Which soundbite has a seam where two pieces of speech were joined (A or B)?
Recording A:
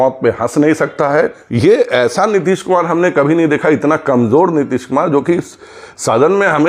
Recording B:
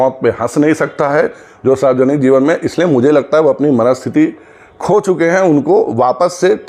A